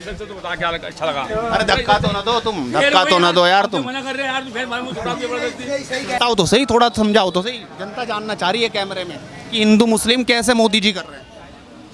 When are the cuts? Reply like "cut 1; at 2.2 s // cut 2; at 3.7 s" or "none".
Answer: cut 1; at 6.2 s